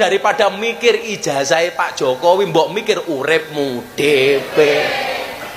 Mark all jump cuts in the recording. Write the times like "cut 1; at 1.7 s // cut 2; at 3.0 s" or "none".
none